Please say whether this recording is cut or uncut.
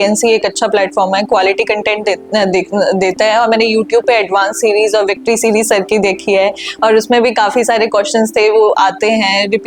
uncut